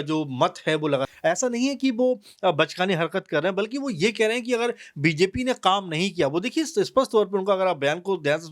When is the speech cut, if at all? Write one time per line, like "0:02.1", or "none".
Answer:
0:01.1